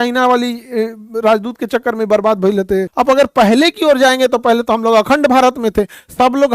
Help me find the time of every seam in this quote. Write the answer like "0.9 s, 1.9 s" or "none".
2.9 s

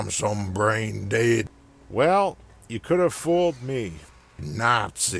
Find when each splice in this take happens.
none

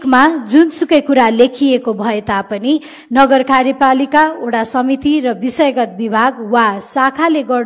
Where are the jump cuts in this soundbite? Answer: none

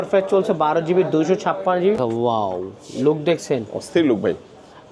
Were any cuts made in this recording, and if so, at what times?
2.0 s

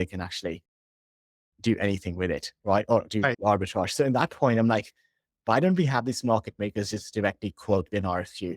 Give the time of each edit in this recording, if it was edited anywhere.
3.4 s

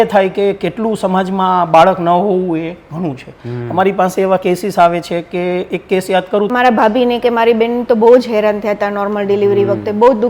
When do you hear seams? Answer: 6.5 s

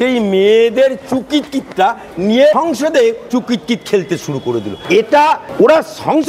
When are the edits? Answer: 2.9 s, 4.8 s, 5.5 s

